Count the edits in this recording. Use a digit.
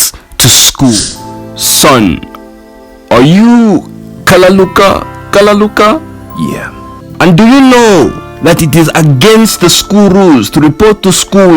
1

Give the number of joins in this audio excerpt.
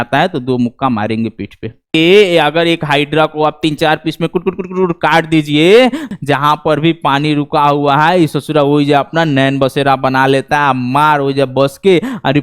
2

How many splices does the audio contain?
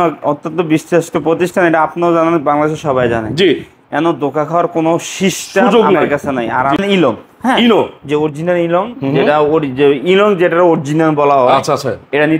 1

